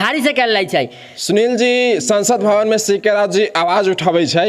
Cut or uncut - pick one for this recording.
cut